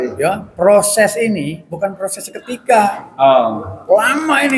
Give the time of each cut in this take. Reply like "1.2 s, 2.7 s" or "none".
none